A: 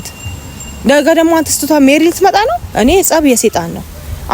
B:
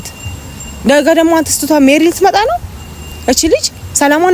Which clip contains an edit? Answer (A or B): A